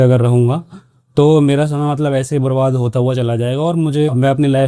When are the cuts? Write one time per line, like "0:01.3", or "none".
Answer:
none